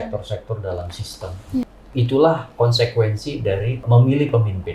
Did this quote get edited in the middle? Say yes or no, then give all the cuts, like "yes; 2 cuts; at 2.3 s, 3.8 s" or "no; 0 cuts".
yes; 2 cuts; at 1.8 s, 3.8 s